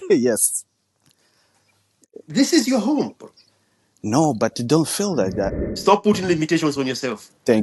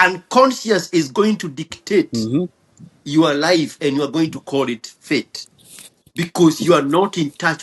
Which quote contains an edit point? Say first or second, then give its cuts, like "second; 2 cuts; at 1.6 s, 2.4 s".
first; 1 cut; at 5.5 s